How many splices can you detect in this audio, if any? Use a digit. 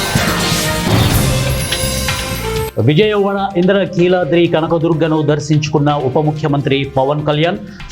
1